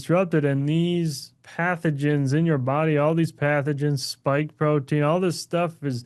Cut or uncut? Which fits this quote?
uncut